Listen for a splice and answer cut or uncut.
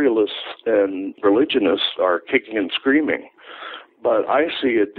cut